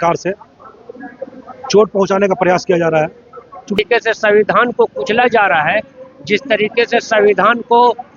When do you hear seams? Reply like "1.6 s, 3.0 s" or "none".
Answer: 3.8 s

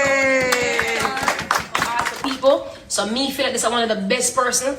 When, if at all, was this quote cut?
2.1 s

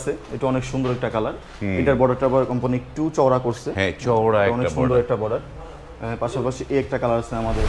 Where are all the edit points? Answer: none

